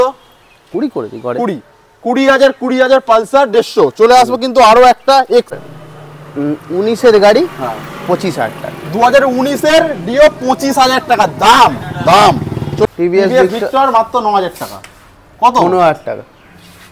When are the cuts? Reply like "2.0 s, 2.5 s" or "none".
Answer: 5.6 s, 12.9 s